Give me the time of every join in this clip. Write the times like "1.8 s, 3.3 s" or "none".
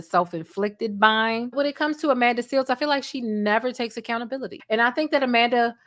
1.5 s, 4.5 s

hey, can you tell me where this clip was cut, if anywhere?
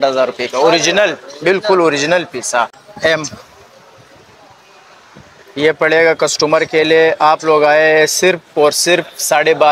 2.8 s

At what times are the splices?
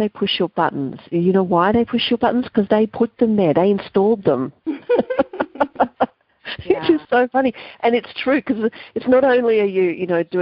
none

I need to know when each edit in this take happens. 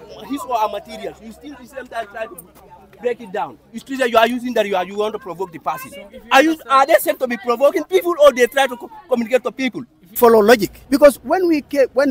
10.1 s, 10.7 s

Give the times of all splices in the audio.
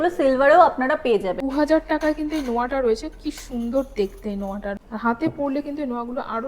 1.4 s, 4.8 s

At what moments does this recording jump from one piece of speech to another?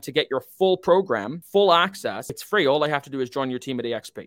1.3 s, 2.3 s

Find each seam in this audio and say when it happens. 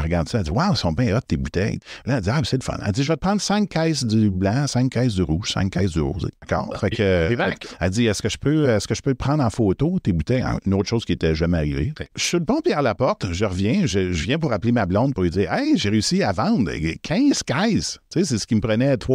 1.8 s, 6.5 s, 12.2 s

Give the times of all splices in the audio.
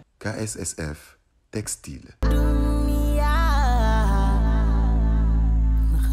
none

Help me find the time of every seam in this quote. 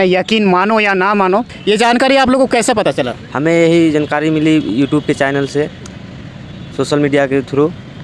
1.5 s

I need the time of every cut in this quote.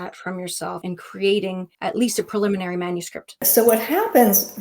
0.8 s, 1.7 s, 3.5 s

